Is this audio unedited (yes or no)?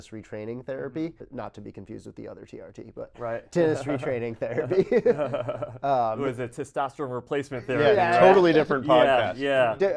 no